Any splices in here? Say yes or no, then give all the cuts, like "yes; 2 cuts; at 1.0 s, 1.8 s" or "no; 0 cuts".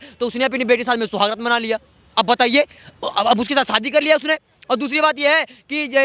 no; 0 cuts